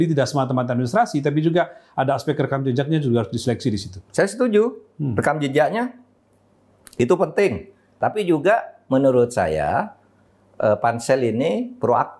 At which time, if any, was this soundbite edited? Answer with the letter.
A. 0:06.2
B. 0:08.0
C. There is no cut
B